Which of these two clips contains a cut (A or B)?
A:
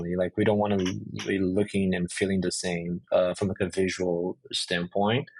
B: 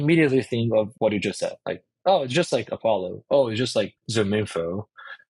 B